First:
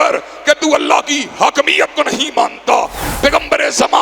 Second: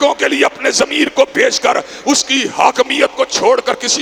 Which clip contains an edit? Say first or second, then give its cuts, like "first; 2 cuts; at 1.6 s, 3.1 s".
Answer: first; 1 cut; at 3.0 s